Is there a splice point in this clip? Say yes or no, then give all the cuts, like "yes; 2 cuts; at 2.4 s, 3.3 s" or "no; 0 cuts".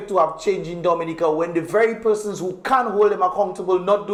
no; 0 cuts